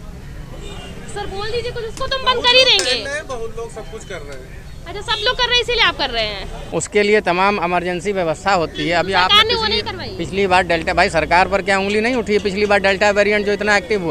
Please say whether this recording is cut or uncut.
cut